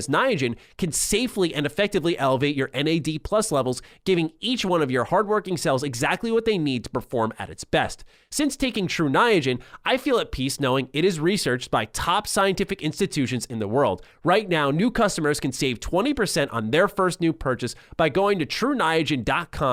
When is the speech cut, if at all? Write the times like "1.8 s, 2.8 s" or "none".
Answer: none